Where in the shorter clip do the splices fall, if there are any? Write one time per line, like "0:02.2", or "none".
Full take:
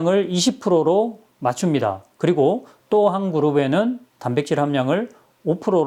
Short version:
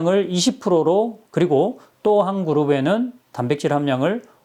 0:01.2